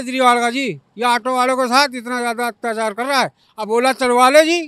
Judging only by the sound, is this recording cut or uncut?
uncut